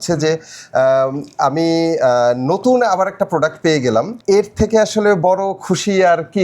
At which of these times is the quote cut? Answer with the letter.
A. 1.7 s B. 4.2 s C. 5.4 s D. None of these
B